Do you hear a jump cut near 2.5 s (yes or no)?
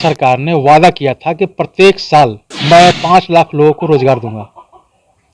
yes